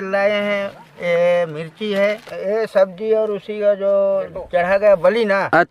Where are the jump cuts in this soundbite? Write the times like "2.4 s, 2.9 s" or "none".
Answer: 2.3 s